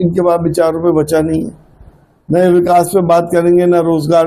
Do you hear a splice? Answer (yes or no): no